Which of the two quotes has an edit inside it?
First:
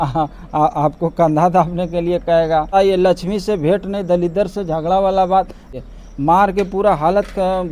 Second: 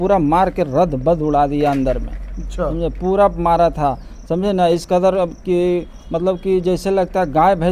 first; 2 cuts; at 2.7 s, 5.6 s

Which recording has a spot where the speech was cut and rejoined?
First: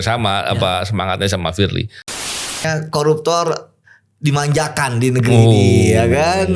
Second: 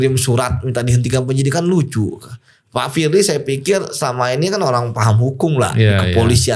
first; 1 cut; at 2.5 s

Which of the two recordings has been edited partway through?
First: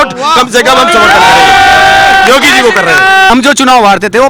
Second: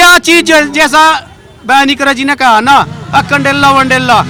first; 1 cut; at 3.3 s

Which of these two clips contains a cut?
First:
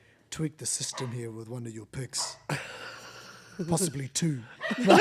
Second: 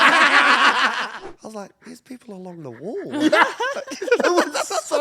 second; 1 cut; at 1.1 s

